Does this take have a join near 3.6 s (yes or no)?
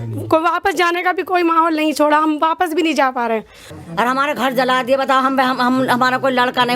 yes